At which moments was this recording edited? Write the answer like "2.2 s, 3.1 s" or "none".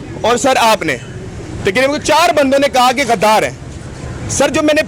none